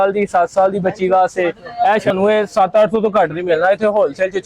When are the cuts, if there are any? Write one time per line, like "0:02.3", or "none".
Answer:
0:02.1